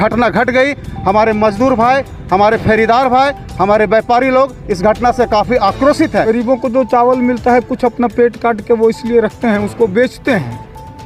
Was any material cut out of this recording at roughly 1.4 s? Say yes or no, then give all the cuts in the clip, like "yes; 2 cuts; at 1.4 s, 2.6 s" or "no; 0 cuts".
no; 1 cut; at 6.3 s